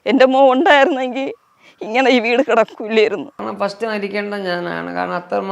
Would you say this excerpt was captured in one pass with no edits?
no; 1 cut; at 3.3 s

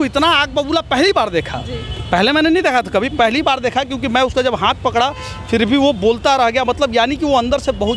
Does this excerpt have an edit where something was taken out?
no; 0 cuts

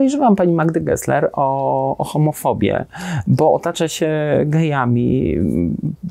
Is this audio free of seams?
yes; 0 cuts

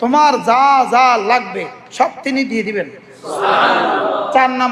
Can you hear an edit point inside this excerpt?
no; 0 cuts

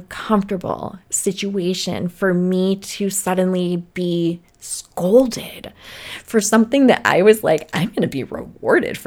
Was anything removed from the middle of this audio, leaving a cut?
no; 0 cuts

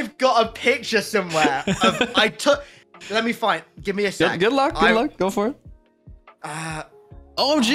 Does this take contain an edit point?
no; 0 cuts

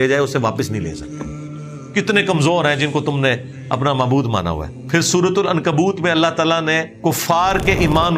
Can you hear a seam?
yes; 2 cuts; at 4.7 s, 6.9 s

